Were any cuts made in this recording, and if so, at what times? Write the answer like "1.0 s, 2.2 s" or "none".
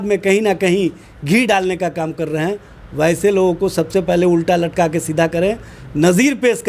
none